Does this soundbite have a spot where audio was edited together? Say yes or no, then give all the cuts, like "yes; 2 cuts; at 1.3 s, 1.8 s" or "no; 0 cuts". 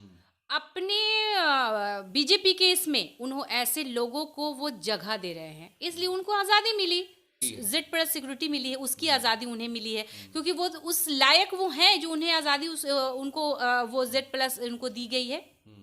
yes; 1 cut; at 7.2 s